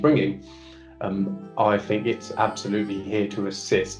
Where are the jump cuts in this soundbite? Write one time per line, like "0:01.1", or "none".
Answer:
none